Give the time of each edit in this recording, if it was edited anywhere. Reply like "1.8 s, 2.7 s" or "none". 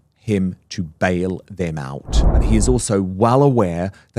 2.4 s